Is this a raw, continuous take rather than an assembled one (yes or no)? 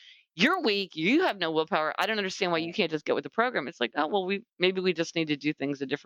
yes